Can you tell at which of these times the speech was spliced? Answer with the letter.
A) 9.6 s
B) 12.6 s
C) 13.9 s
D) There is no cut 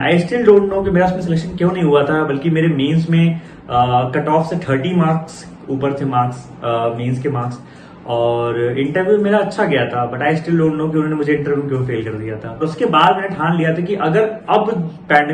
B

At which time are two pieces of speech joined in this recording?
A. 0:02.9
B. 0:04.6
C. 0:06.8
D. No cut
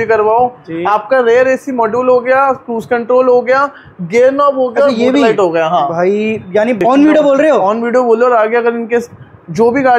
C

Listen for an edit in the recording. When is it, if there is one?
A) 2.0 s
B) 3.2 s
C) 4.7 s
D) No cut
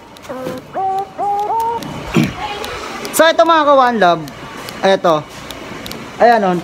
A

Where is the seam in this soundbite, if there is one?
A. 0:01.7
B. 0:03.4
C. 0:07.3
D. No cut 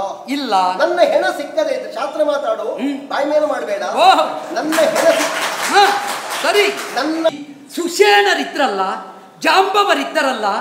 C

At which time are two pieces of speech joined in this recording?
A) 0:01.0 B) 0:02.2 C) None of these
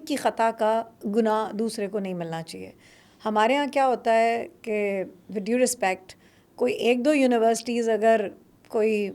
A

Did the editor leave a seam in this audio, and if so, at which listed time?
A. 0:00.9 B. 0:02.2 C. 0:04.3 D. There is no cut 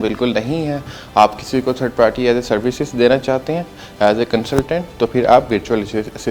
D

